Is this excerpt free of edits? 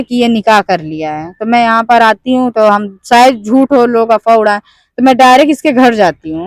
yes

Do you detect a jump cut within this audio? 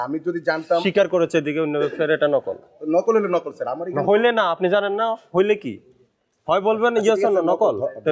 no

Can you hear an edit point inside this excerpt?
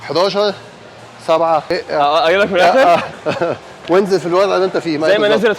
yes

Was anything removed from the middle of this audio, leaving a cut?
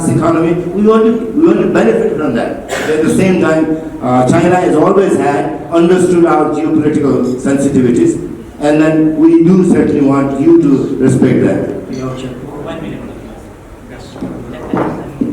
no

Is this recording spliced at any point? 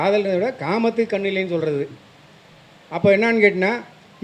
no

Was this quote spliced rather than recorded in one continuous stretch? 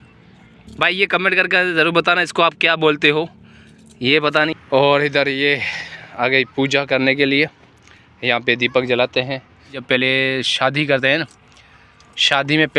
yes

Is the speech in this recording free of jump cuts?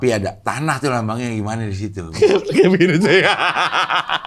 no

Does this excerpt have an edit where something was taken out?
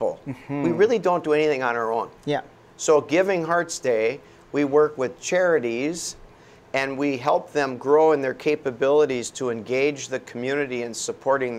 no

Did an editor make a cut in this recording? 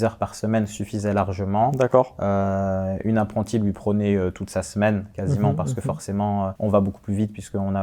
no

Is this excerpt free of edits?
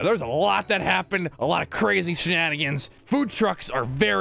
no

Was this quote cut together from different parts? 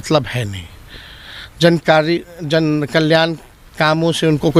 no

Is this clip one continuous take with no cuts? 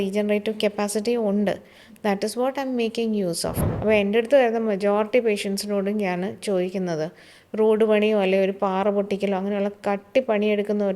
no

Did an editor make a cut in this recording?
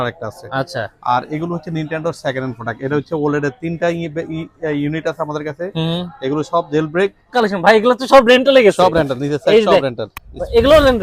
yes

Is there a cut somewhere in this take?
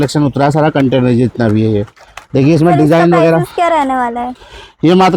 no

